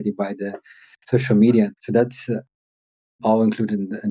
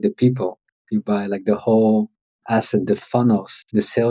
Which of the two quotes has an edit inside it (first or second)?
first